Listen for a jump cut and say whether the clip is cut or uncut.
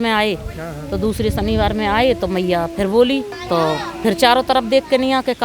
cut